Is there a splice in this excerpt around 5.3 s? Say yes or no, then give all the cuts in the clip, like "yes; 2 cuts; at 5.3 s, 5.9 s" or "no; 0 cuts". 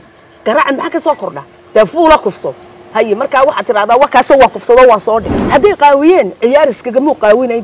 yes; 1 cut; at 5.3 s